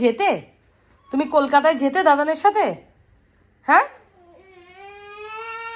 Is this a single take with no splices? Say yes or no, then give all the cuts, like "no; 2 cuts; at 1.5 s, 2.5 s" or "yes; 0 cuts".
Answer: yes; 0 cuts